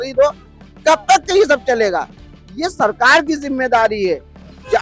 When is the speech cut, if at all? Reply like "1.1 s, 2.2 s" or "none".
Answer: none